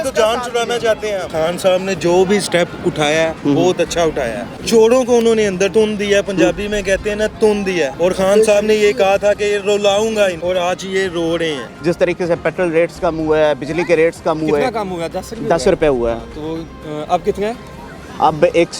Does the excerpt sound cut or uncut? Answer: cut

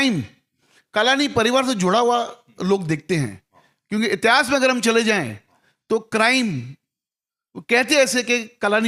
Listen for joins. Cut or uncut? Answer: uncut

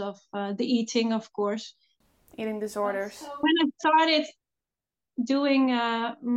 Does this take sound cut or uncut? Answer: uncut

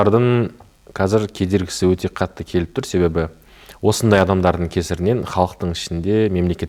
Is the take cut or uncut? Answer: uncut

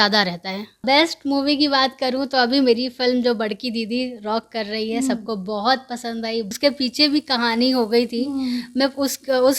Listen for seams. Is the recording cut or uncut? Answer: cut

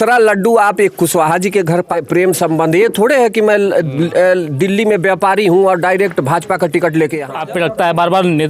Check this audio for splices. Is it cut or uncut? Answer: cut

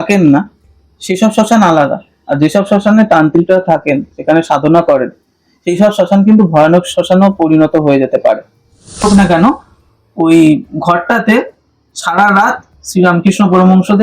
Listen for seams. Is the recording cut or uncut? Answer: cut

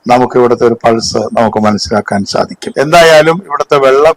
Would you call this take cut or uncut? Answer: cut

